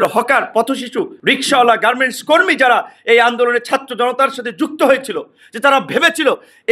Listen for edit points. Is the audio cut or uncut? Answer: cut